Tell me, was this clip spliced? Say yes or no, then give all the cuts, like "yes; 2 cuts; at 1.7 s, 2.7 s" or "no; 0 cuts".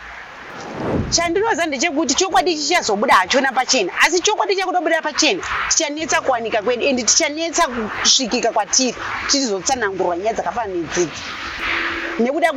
no; 0 cuts